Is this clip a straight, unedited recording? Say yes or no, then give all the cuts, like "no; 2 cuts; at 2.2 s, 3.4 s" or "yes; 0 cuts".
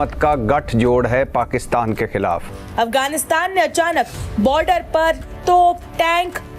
no; 1 cut; at 2.6 s